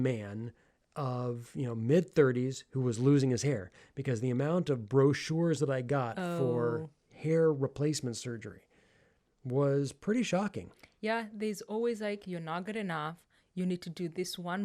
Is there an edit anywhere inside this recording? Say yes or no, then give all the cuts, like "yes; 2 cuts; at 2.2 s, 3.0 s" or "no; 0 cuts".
no; 0 cuts